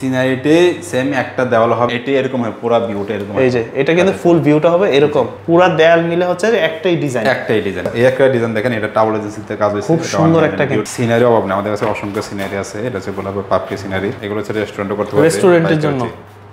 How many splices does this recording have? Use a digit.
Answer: 5